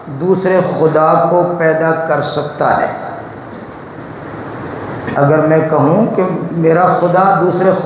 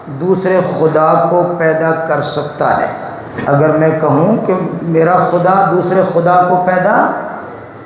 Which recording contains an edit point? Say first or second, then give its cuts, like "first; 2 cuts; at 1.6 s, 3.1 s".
second; 1 cut; at 3.3 s